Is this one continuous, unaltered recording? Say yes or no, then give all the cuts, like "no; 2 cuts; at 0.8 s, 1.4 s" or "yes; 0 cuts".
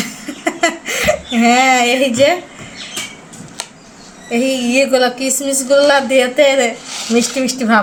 yes; 0 cuts